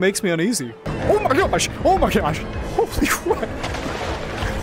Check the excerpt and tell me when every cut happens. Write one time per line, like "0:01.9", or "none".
0:01.0

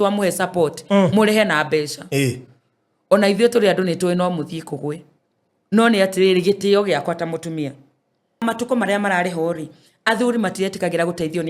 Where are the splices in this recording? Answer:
0:08.4

